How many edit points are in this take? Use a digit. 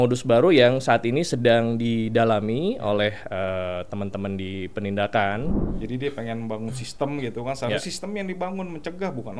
1